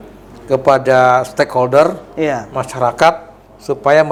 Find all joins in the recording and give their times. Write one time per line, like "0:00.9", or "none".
none